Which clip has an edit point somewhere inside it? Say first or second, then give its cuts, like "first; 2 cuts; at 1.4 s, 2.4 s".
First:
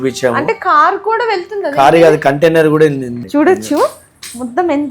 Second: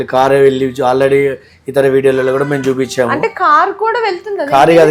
first; 1 cut; at 3.1 s